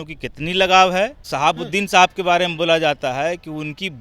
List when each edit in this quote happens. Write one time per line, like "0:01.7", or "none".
0:01.3